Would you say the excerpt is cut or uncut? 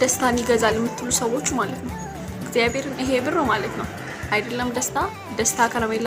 uncut